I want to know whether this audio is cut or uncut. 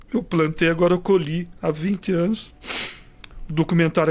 cut